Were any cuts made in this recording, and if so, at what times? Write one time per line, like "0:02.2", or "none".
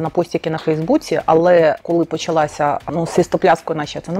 0:01.8
0:02.8